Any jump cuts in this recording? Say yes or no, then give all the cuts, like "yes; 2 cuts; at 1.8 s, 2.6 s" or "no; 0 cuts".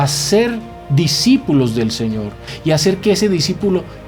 yes; 1 cut; at 2.4 s